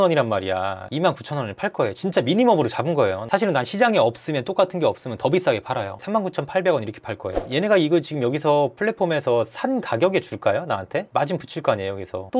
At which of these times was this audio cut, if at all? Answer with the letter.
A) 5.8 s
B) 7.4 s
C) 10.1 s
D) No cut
B